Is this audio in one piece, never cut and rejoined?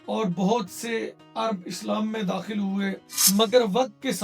no; 1 cut; at 3.1 s

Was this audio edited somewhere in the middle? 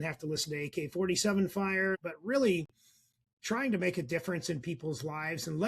yes; 1 cut; at 1.9 s

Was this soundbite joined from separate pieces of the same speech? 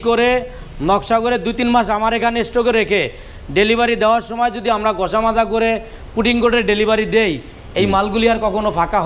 no; 0 cuts

